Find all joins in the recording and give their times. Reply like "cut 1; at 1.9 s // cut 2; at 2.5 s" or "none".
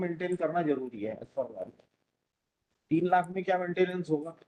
none